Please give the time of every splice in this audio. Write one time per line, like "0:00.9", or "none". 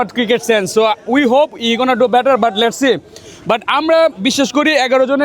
none